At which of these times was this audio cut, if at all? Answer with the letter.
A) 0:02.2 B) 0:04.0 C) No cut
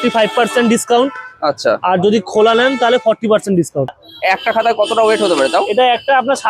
B